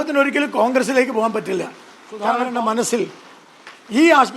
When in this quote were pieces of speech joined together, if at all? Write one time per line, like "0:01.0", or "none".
0:02.4